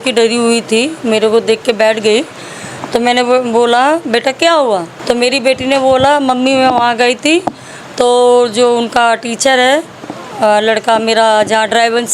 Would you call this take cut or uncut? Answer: cut